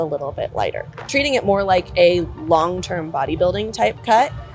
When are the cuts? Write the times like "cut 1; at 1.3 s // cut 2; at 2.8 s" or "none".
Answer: cut 1; at 1.1 s